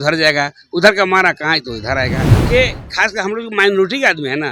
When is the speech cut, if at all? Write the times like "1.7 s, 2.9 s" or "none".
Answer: 2.3 s